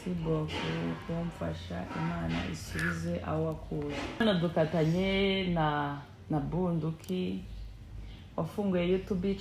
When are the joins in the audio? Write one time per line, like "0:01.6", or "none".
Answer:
0:04.2

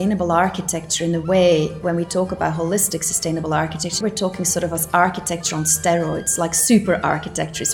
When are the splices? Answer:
0:01.8
0:04.0

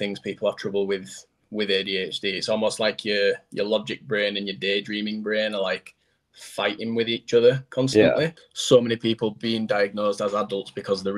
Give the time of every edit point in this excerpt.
0:08.4

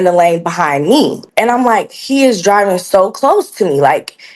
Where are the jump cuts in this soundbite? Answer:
0:01.3

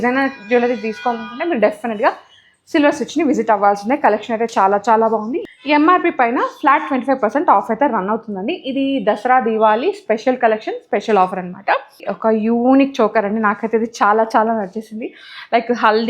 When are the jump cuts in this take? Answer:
0:05.4
0:12.1

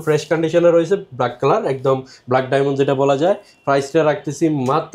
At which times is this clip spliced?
none

